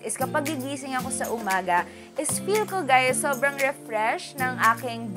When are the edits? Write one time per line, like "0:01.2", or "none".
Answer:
none

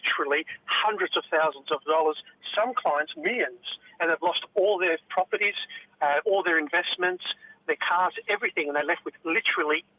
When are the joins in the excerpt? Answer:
none

